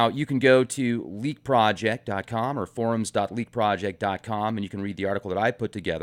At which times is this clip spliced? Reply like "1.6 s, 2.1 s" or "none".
1.1 s